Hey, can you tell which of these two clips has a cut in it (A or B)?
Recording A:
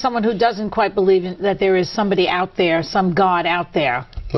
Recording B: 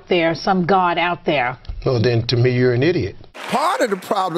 B